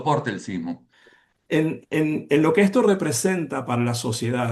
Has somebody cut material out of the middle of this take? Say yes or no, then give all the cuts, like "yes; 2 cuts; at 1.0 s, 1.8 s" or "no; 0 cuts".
yes; 1 cut; at 0.9 s